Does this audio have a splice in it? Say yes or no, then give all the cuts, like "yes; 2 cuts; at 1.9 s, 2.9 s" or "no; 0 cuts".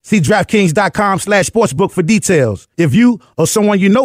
no; 0 cuts